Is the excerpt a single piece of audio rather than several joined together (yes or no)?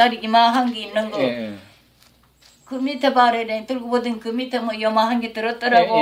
yes